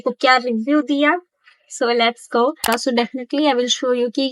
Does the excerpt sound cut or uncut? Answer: cut